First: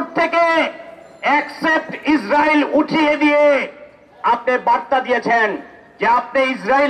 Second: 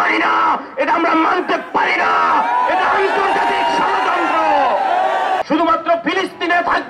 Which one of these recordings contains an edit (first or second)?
second